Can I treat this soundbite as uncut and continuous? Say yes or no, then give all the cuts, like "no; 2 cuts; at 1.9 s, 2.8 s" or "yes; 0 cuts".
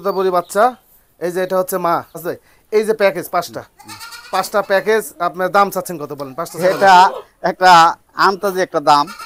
no; 1 cut; at 2.2 s